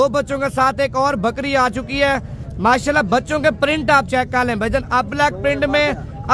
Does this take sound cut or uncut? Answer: uncut